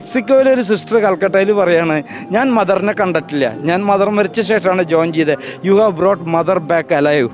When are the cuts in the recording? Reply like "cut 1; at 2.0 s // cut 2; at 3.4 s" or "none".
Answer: none

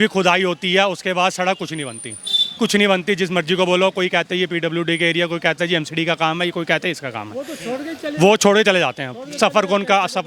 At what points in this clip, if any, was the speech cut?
none

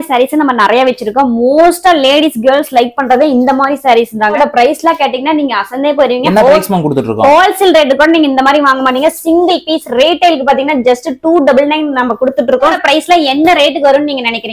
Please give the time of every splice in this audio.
cut 1; at 4.4 s // cut 2; at 12.8 s

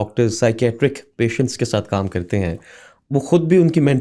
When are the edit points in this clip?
none

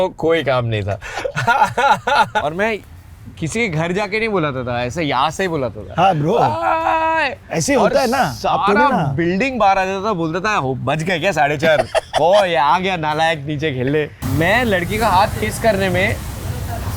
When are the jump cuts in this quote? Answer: cut 1; at 2.5 s // cut 2; at 14.2 s

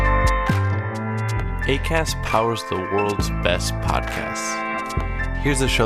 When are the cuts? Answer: cut 1; at 0.9 s

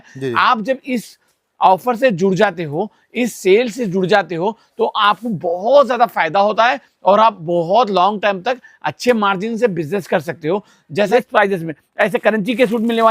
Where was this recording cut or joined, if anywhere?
cut 1; at 11.1 s

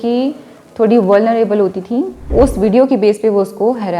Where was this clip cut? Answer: cut 1; at 2.2 s

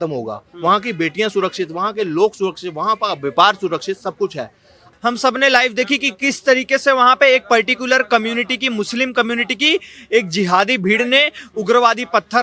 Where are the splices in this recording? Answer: cut 1; at 4.8 s

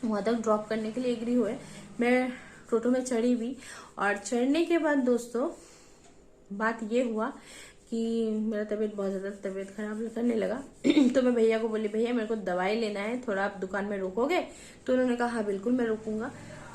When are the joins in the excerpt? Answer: none

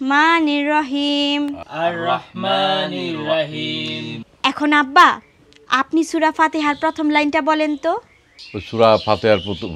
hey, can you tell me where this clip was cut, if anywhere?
cut 1; at 4.3 s

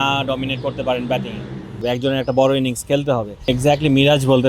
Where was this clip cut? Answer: cut 1; at 1.8 s // cut 2; at 3.3 s

